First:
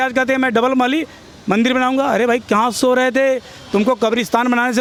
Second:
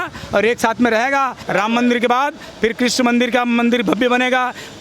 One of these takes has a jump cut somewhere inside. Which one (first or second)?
second